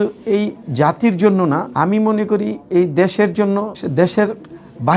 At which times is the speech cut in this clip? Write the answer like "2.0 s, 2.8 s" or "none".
1.7 s, 3.8 s